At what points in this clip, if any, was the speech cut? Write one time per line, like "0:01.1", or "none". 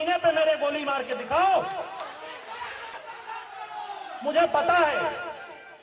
0:03.0